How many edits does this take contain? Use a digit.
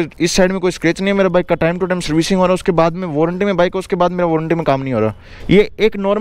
1